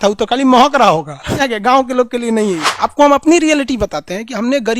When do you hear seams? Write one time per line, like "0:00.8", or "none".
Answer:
0:01.4
0:02.7